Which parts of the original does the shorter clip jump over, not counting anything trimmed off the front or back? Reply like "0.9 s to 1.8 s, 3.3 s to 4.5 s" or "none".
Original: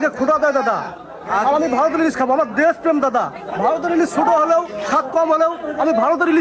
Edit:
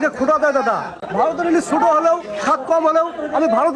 1.0 s to 3.4 s